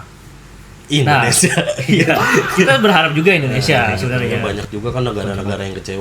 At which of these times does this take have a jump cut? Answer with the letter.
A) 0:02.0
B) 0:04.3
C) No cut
B